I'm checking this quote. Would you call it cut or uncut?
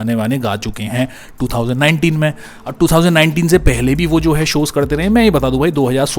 uncut